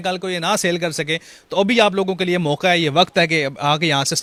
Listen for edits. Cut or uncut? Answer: uncut